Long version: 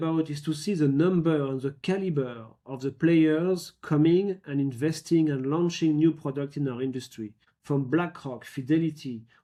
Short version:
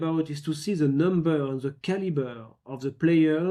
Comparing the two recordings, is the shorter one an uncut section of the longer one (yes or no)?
yes